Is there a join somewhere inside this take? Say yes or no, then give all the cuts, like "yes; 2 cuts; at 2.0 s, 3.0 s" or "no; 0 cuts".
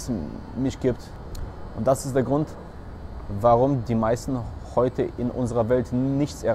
yes; 1 cut; at 1.1 s